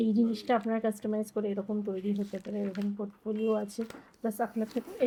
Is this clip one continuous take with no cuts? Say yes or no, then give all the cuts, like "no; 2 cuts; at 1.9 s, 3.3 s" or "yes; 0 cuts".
yes; 0 cuts